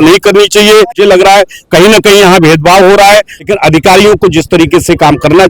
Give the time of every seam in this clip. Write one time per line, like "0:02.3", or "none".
0:01.0
0:03.4